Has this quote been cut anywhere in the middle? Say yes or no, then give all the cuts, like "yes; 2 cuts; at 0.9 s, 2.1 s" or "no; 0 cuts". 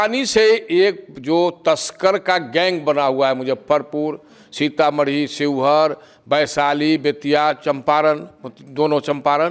no; 0 cuts